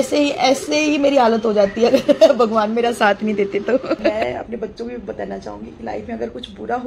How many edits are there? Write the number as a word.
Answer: one